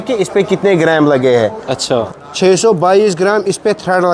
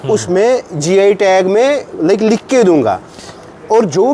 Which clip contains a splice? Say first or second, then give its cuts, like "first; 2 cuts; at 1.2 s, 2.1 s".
first; 1 cut; at 2.1 s